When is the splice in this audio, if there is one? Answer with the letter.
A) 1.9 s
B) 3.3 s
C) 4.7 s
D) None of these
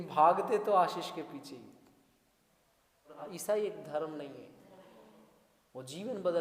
B